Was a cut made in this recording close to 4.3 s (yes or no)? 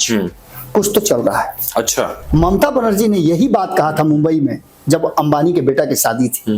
no